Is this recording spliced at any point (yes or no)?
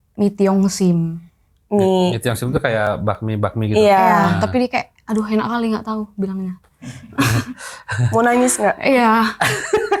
no